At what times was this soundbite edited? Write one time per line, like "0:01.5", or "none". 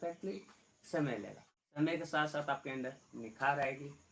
0:01.8